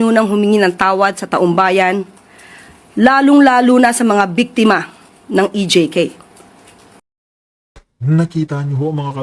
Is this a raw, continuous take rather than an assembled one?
yes; 0 cuts

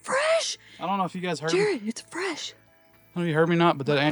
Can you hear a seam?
no; 0 cuts

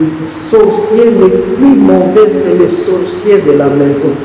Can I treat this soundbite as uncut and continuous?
yes; 0 cuts

